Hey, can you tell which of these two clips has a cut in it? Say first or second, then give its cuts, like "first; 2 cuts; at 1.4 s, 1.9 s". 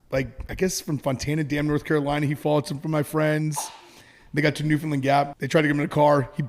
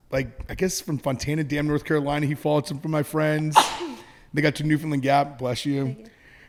first; 1 cut; at 5.3 s